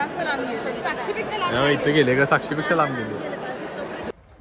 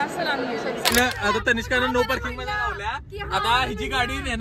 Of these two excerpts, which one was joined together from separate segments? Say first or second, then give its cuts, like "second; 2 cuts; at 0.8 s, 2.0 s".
second; 1 cut; at 0.9 s